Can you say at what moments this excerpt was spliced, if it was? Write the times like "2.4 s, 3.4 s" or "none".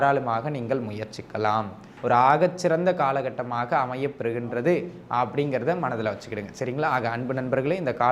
1.8 s